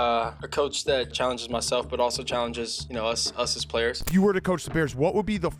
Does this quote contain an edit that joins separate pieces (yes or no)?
yes